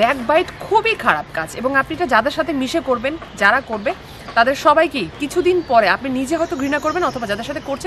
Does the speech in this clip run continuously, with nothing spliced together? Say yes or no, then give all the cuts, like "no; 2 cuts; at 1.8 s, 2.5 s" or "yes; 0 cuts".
yes; 0 cuts